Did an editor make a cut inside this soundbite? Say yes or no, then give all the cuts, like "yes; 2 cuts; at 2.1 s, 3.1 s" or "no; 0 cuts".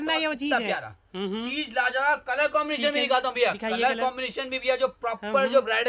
no; 0 cuts